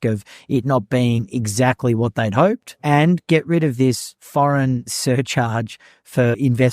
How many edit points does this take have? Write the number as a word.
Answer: two